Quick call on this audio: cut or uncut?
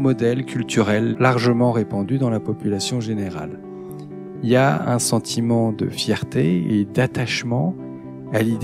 cut